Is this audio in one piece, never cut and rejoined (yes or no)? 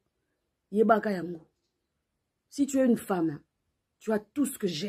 yes